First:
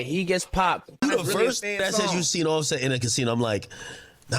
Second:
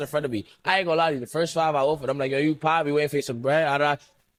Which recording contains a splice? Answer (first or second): first